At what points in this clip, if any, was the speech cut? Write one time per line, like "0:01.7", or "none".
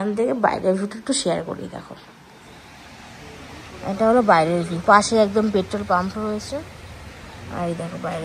none